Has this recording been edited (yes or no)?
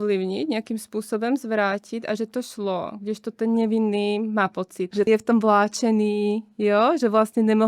yes